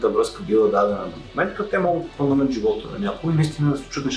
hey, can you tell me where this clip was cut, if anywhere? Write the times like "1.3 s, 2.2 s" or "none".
none